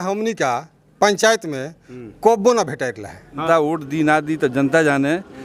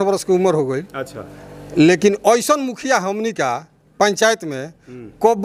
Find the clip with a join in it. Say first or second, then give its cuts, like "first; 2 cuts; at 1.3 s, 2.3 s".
first; 1 cut; at 3.4 s